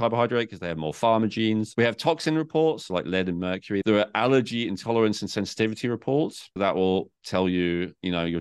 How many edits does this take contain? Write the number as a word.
three